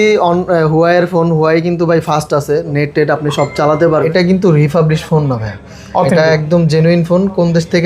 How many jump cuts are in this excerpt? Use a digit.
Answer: 1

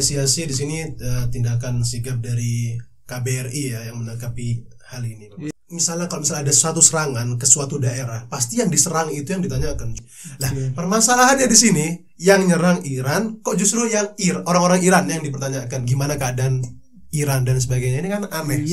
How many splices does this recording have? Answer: 2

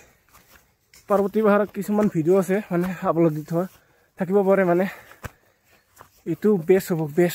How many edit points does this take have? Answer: 1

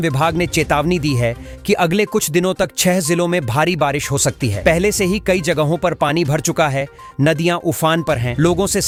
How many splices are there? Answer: 0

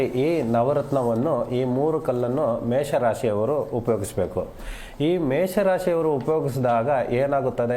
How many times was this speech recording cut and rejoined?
3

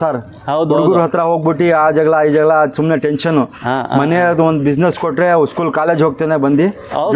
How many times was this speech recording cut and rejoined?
0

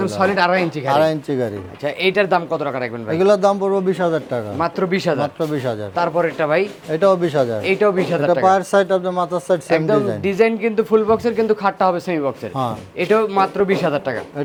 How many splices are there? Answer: 0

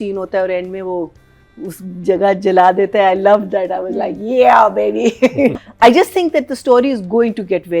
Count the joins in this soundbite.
1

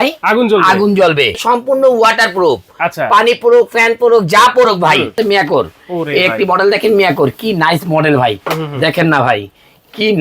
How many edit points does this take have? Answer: 2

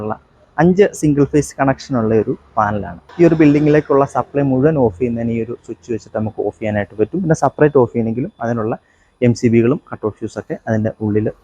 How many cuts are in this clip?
1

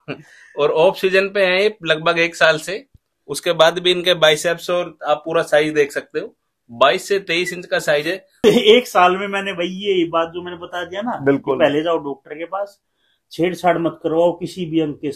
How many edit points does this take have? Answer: 1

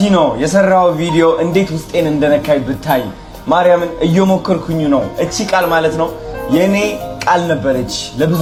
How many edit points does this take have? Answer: 0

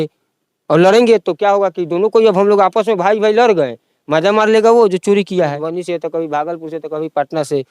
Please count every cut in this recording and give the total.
1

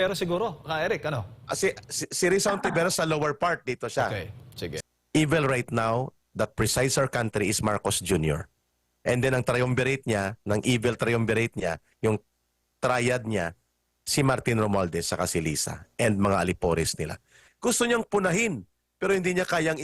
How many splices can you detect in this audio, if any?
2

